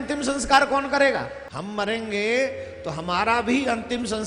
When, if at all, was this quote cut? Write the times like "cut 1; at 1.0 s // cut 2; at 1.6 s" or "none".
cut 1; at 1.5 s